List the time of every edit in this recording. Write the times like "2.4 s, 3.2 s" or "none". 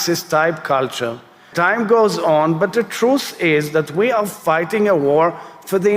1.5 s

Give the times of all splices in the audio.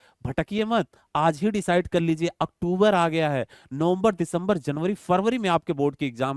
none

